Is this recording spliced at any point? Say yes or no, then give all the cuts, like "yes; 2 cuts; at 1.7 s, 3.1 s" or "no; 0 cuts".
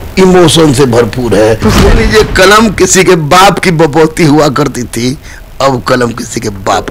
yes; 1 cut; at 1.6 s